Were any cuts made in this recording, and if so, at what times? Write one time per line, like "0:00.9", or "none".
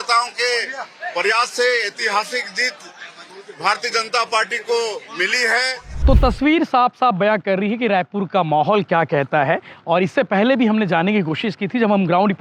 0:05.9